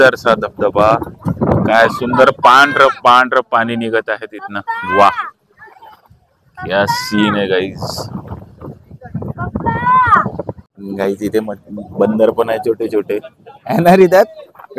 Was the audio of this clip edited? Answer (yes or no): no